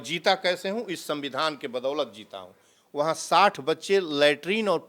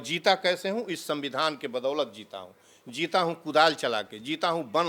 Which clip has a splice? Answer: first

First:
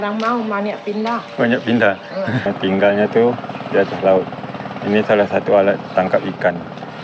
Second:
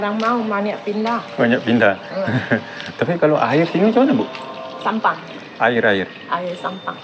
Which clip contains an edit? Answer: first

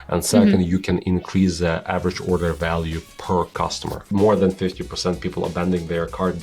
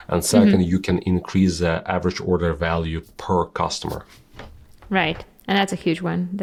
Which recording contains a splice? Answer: first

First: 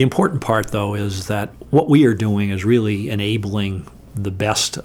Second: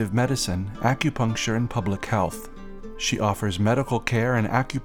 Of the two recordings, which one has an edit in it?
first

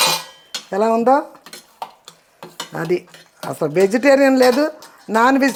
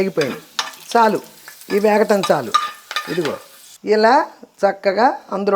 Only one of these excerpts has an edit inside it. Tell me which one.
second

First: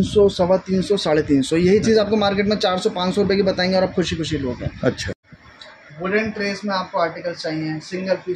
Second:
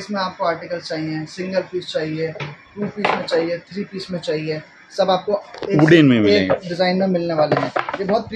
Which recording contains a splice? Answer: first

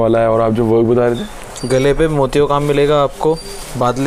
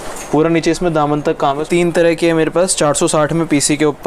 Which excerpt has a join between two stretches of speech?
second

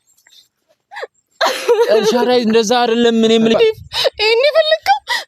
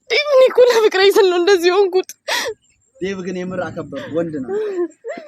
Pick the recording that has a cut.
first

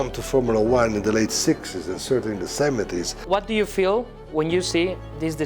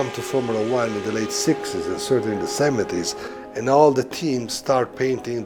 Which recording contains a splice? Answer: first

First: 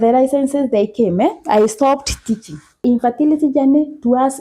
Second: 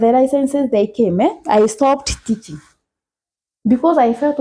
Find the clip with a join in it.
first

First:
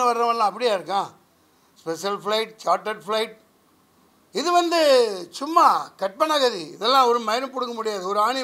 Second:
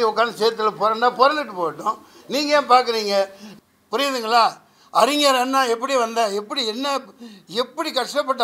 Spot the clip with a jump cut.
second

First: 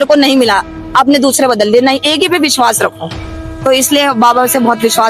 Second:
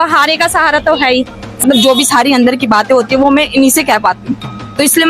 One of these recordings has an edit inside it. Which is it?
second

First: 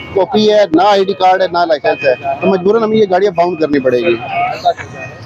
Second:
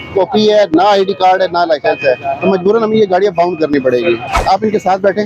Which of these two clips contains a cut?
second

